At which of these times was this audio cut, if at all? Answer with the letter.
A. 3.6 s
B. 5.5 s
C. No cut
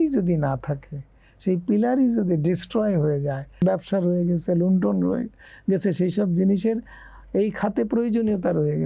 A